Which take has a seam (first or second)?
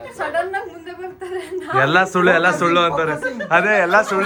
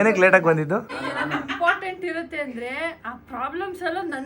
second